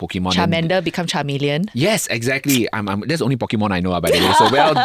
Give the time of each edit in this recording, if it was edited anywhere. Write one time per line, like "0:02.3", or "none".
none